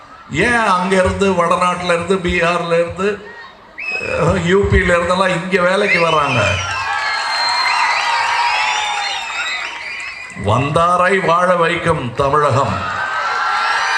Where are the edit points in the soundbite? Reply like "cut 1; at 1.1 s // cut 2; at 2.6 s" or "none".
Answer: none